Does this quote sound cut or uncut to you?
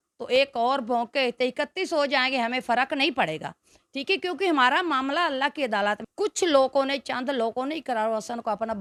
uncut